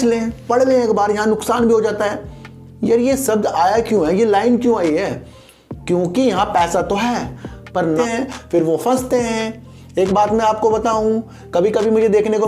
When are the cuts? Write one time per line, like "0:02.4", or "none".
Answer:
0:08.0